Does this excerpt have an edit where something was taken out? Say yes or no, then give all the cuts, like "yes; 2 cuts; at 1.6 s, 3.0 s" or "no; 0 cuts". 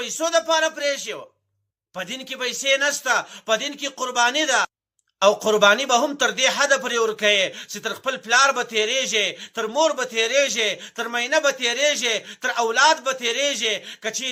no; 0 cuts